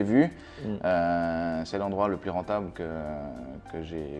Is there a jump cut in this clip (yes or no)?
no